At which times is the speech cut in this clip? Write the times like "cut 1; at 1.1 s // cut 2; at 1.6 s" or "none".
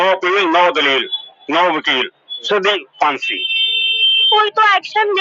cut 1; at 4.3 s